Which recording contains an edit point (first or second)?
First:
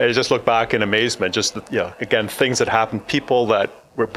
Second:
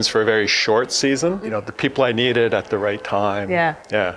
second